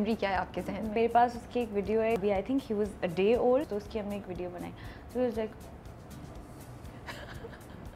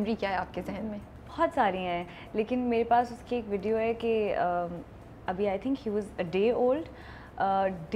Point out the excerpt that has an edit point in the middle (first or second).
first